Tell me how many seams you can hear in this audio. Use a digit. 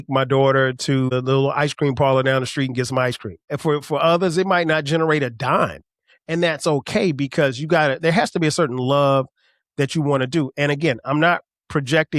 2